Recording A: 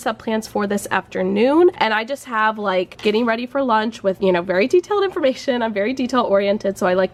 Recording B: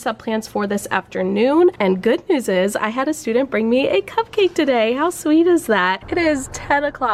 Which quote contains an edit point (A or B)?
B